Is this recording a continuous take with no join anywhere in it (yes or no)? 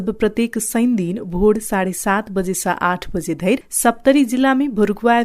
no